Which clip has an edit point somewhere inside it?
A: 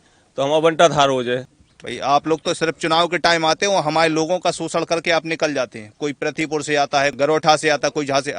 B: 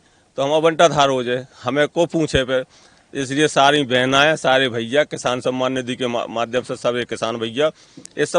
A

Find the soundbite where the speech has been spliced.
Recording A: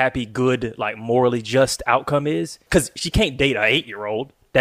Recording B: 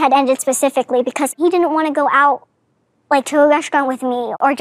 A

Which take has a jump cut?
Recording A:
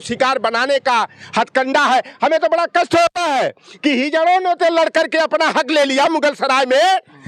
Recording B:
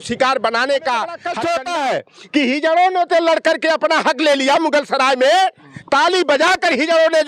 B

